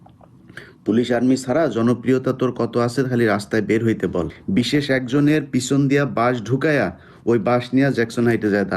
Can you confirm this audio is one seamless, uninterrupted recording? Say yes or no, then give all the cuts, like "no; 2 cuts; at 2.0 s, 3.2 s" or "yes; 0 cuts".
no; 1 cut; at 4.4 s